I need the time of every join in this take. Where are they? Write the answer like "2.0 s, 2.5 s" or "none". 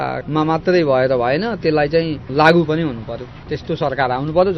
none